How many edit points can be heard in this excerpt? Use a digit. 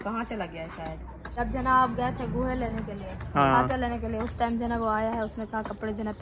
1